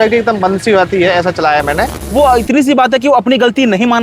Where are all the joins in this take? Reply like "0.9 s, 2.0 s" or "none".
2.0 s